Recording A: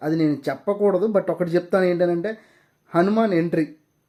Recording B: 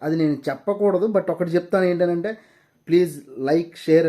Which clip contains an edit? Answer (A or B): B